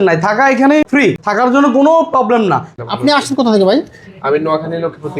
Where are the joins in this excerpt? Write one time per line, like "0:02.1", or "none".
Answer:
0:01.1
0:02.7